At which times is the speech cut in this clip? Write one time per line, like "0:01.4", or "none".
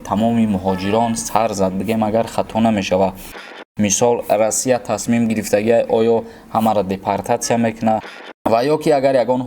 0:03.4
0:08.2